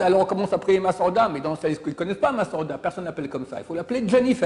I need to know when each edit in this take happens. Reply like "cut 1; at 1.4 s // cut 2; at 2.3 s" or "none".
none